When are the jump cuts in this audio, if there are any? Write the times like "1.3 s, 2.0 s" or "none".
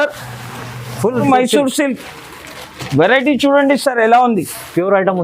1.2 s